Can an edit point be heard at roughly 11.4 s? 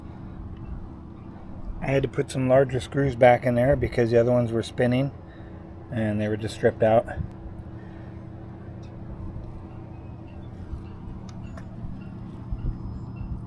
no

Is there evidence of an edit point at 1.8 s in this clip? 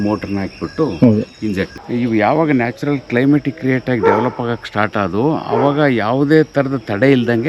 yes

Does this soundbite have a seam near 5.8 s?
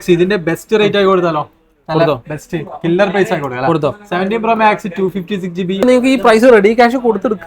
yes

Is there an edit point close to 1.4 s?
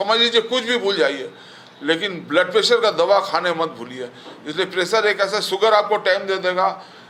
no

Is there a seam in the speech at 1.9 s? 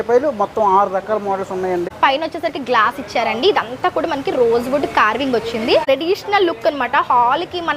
yes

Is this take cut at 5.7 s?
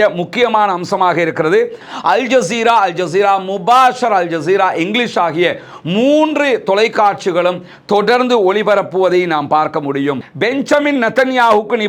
no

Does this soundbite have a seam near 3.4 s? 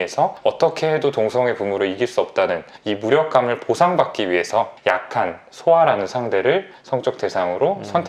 no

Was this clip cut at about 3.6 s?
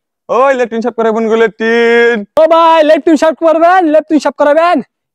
no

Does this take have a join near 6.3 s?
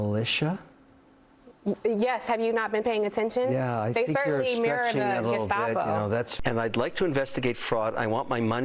yes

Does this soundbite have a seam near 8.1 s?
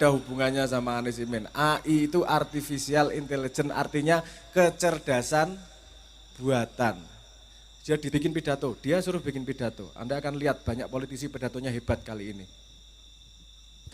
yes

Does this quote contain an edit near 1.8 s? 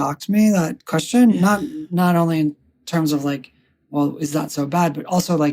yes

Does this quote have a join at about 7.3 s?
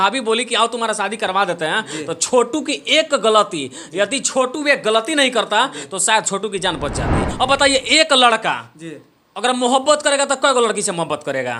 yes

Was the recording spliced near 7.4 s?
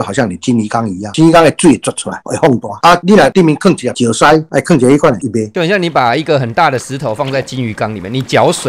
no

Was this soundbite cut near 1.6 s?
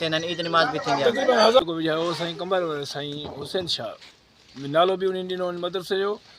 yes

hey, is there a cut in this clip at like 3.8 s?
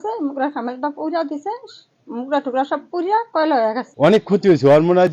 yes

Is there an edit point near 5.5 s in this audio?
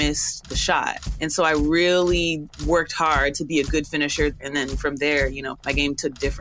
yes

